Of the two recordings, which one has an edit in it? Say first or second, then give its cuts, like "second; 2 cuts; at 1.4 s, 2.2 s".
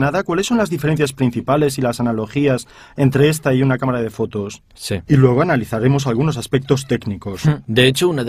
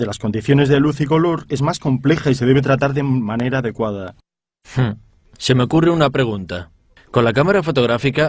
second; 1 cut; at 2.9 s